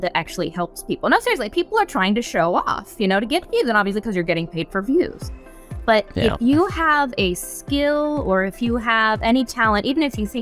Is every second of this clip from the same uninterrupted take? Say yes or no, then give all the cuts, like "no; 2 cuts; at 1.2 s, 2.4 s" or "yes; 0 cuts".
yes; 0 cuts